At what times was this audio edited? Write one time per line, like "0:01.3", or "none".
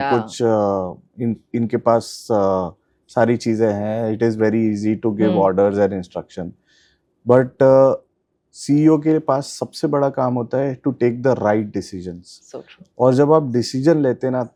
none